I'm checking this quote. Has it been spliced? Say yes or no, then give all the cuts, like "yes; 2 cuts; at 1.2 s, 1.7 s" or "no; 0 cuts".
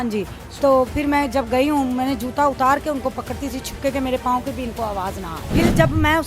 yes; 1 cut; at 5.3 s